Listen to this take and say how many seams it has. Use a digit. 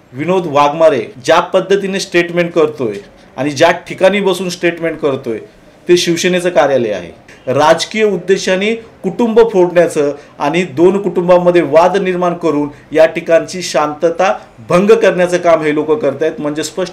2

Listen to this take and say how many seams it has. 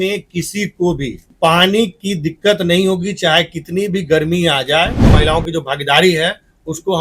2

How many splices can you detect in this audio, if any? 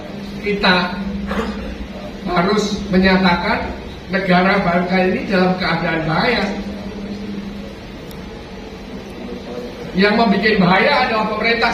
0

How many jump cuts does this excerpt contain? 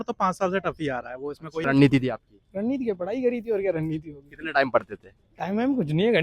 1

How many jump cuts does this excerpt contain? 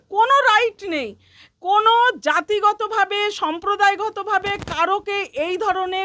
0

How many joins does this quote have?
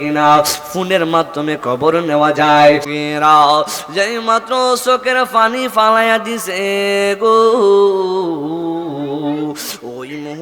1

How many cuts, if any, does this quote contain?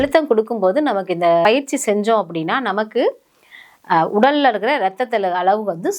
1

